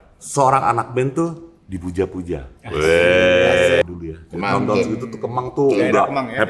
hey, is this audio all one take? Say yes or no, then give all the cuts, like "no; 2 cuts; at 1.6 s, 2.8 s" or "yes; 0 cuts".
no; 1 cut; at 3.8 s